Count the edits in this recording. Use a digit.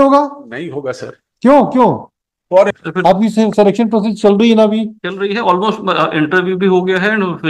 1